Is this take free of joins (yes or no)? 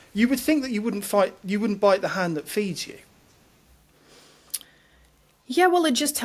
yes